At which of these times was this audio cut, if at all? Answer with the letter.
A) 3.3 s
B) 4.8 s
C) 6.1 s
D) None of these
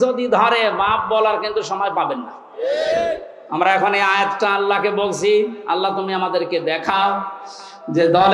D